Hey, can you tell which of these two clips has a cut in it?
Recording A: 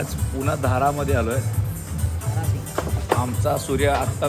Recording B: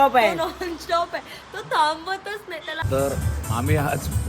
B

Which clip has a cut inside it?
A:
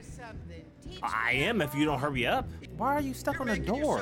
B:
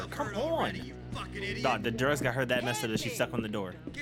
A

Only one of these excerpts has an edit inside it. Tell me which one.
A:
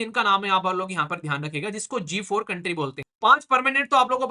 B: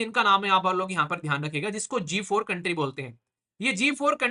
A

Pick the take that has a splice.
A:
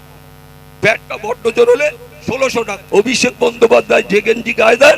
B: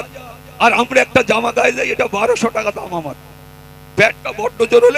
A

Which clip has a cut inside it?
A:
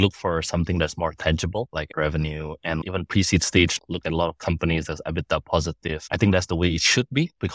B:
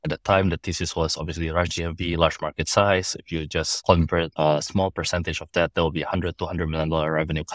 A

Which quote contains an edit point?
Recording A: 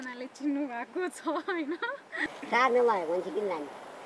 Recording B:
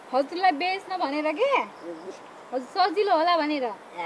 A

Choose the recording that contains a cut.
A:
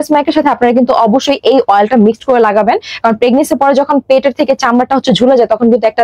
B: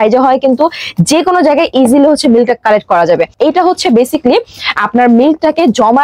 B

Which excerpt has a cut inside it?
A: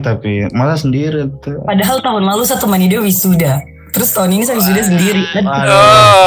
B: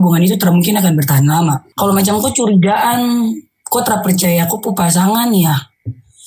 B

